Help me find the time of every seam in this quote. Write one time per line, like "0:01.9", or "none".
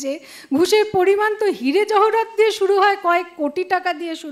none